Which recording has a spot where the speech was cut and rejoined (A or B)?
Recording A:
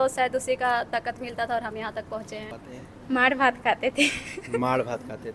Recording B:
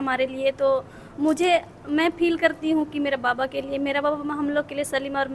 A